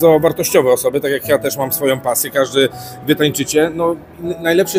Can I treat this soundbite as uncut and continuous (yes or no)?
yes